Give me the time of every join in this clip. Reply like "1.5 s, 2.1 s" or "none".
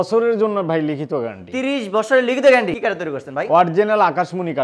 2.7 s

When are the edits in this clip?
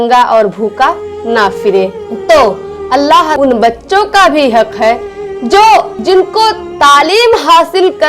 3.3 s

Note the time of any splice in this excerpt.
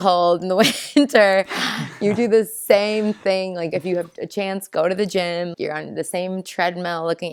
3.7 s

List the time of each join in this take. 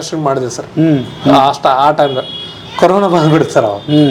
none

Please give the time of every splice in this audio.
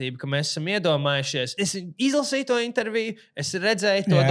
1.5 s

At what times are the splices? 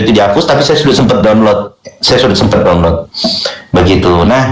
none

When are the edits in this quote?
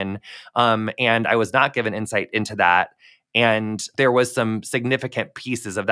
3.8 s

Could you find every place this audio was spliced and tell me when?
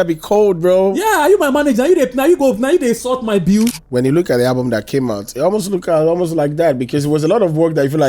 3.8 s

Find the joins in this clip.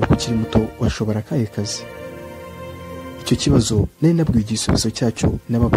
none

